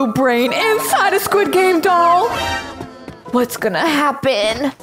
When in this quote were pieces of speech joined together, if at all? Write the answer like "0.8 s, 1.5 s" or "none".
none